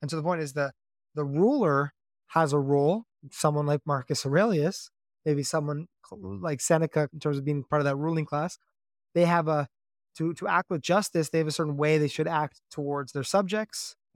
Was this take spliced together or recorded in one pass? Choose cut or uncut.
cut